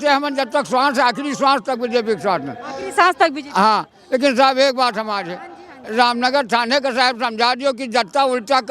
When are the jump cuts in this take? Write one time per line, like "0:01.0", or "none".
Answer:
none